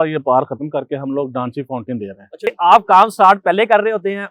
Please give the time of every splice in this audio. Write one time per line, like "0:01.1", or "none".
0:02.5